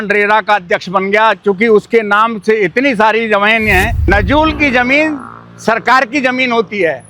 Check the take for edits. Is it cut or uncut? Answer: cut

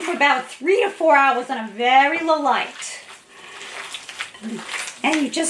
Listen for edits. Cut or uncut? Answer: uncut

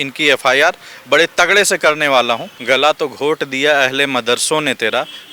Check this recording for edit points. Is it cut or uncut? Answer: cut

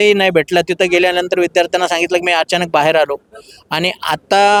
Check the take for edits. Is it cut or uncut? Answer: uncut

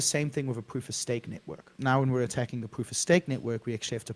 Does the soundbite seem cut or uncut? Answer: cut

